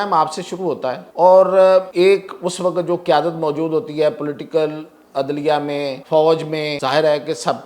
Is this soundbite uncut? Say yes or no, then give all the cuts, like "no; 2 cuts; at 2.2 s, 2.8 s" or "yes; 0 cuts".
no; 4 cuts; at 1.0 s, 1.9 s, 6.0 s, 6.7 s